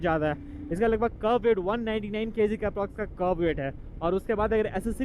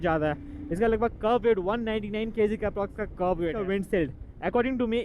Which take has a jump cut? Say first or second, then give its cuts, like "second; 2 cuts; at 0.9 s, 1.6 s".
second; 1 cut; at 3.5 s